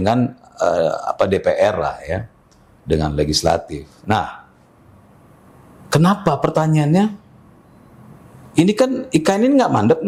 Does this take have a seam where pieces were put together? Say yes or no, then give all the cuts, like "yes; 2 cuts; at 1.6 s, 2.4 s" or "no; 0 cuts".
no; 0 cuts